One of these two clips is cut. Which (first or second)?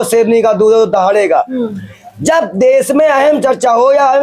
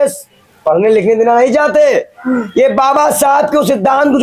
first